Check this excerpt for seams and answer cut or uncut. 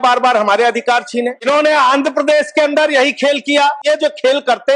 cut